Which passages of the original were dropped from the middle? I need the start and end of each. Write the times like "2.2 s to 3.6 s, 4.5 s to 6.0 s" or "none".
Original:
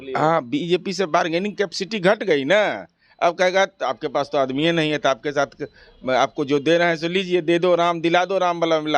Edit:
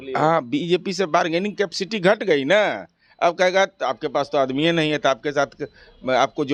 none